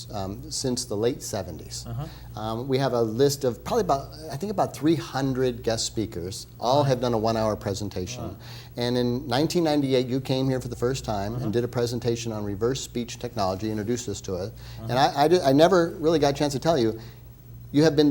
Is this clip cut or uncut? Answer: cut